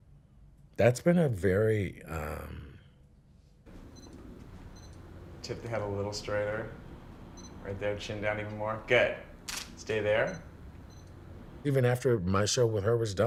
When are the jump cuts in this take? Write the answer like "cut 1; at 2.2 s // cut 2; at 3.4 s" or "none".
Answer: none